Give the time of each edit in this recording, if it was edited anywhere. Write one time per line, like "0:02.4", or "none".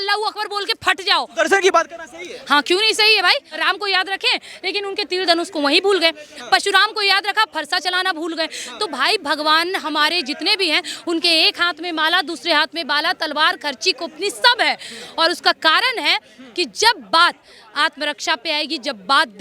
0:01.3
0:03.6